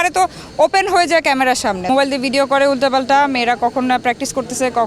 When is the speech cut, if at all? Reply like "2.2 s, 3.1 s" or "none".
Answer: 1.8 s